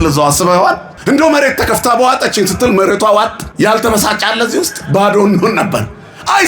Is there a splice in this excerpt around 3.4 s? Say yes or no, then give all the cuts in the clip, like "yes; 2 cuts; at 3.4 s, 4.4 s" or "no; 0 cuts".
yes; 2 cuts; at 0.9 s, 3.4 s